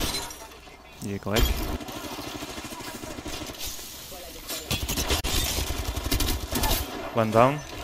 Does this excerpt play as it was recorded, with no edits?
no; 1 cut; at 1.8 s

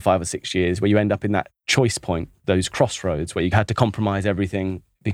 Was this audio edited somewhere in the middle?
yes; 2 cuts; at 1.6 s, 3.5 s

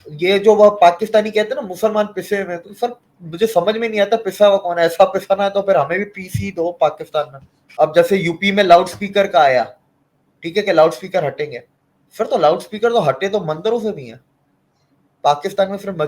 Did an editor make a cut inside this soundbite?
yes; 1 cut; at 7.6 s

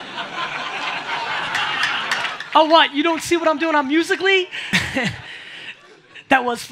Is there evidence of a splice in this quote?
yes; 1 cut; at 4.7 s

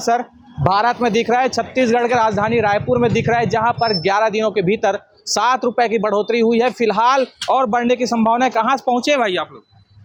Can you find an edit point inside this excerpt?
no; 0 cuts

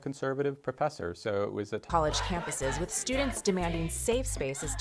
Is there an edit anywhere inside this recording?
no; 0 cuts

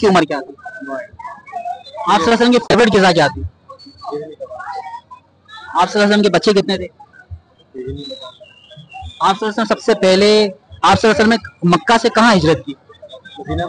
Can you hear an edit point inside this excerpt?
no; 0 cuts

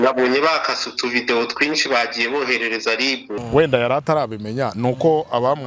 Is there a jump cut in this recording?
yes; 1 cut; at 3.3 s

